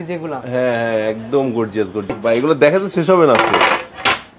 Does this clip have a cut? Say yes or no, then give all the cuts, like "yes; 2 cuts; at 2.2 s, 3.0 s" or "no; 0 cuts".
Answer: yes; 1 cut; at 2.2 s